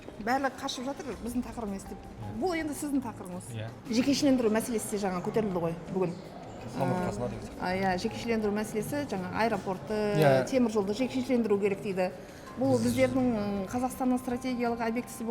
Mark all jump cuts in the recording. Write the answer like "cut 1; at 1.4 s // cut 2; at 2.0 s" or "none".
cut 1; at 3.7 s